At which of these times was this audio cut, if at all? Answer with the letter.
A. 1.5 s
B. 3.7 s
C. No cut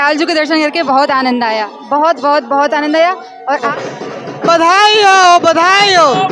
B